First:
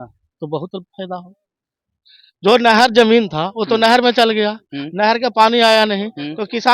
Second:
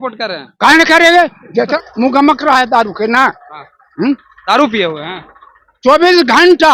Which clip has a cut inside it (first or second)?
second